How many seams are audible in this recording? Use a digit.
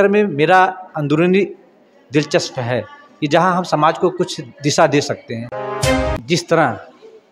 1